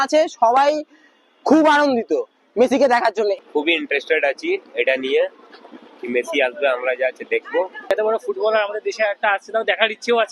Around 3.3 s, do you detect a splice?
no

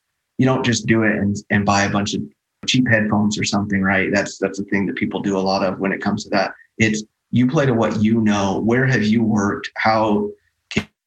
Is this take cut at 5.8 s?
no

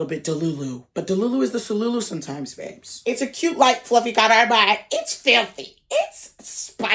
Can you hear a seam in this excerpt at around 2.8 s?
yes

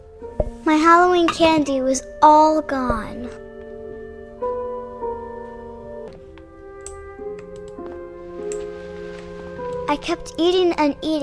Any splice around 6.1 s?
yes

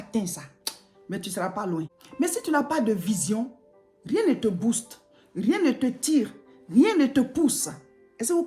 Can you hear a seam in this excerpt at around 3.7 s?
no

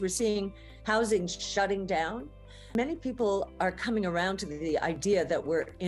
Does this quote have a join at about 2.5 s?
yes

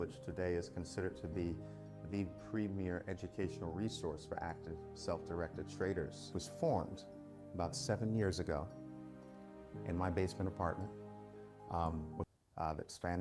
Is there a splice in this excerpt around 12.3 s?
yes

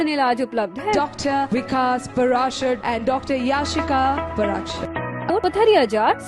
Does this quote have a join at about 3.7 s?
no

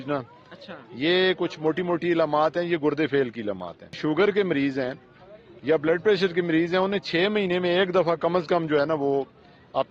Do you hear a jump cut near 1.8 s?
no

